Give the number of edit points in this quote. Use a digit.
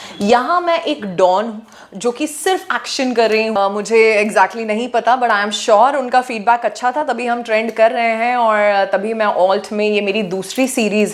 1